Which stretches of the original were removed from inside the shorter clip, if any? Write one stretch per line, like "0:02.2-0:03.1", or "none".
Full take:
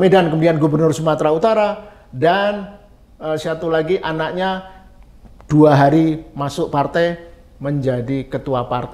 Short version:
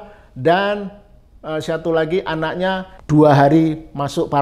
0:04.7-0:05.3